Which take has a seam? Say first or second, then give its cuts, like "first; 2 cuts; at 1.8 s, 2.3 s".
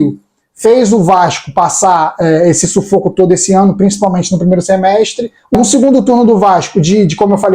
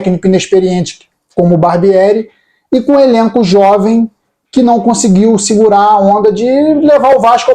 first; 1 cut; at 5.5 s